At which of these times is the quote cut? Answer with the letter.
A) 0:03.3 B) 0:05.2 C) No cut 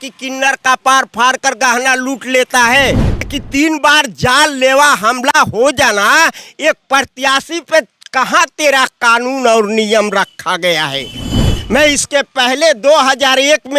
A